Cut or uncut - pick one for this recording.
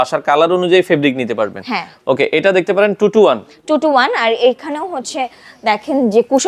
uncut